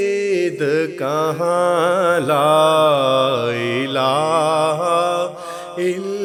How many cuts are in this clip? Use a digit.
0